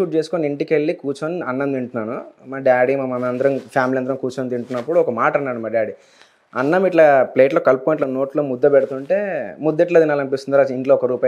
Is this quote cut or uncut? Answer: uncut